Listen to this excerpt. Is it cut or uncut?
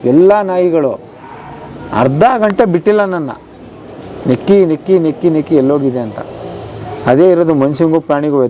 uncut